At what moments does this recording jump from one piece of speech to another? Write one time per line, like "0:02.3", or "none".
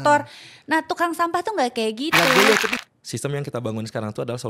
0:02.7